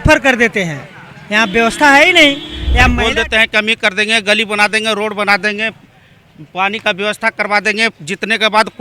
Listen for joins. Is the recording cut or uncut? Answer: cut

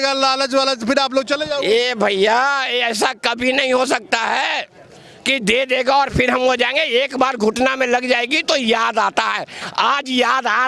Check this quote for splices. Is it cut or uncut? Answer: uncut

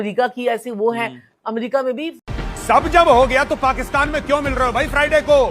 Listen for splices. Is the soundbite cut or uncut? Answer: uncut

